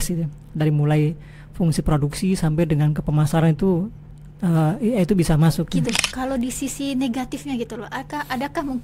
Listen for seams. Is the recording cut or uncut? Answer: cut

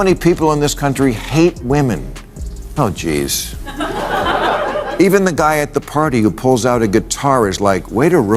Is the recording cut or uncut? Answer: uncut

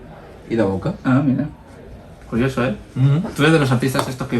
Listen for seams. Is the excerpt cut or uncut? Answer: uncut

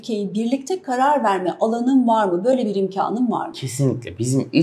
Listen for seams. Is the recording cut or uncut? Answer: uncut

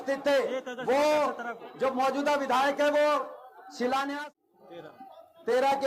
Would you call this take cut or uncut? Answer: cut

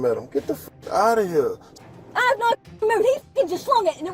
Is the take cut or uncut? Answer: cut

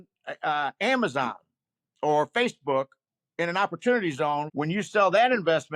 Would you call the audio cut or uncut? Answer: cut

